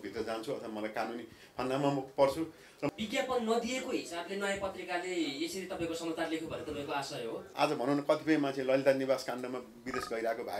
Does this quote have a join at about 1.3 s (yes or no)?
no